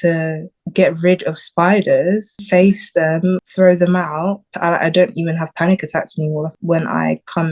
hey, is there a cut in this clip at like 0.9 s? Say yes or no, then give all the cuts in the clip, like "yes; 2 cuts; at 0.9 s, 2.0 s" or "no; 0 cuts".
no; 4 cuts; at 2.3 s, 3.4 s, 4.5 s, 6.5 s